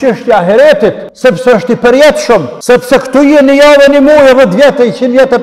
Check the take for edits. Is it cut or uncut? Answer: cut